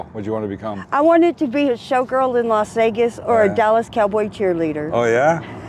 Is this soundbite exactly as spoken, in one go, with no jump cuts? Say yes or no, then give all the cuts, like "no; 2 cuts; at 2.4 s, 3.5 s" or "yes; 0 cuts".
yes; 0 cuts